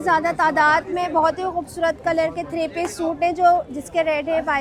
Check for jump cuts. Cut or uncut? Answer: uncut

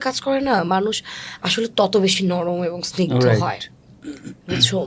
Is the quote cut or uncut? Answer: uncut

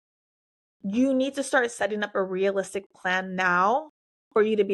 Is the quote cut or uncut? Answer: uncut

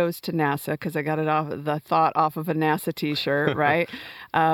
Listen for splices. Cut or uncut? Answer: uncut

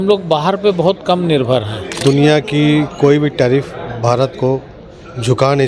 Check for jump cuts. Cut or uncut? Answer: cut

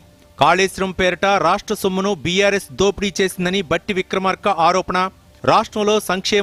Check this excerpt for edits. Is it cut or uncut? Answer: uncut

